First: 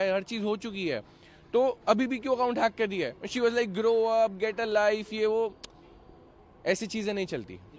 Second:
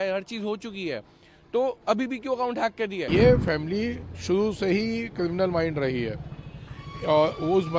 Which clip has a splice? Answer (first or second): second